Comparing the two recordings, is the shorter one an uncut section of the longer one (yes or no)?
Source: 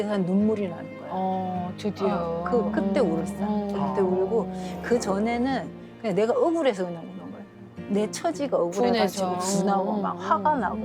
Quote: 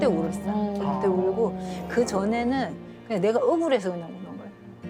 yes